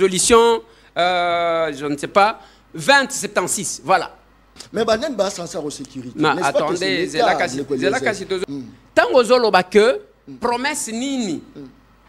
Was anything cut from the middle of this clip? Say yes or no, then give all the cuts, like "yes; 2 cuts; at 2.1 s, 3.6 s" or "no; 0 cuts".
yes; 2 cuts; at 4.6 s, 8.4 s